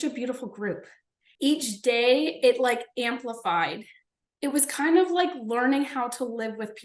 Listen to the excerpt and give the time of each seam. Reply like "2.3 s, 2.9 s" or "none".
1.3 s